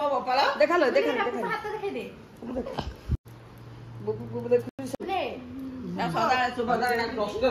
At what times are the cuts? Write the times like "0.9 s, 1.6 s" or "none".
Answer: 3.0 s

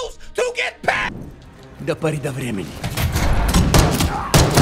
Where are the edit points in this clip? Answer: 1.2 s

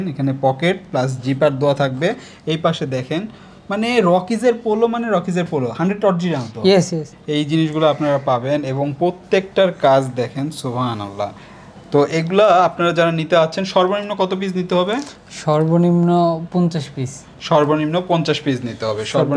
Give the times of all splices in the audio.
none

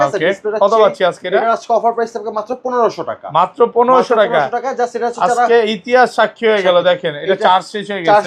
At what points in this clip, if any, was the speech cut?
none

